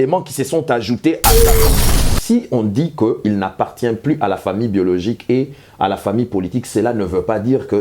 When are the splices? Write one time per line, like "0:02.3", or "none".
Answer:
0:01.8